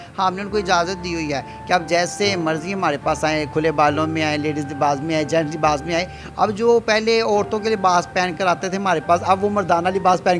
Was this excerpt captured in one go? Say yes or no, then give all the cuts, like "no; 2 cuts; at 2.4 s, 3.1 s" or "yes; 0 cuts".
yes; 0 cuts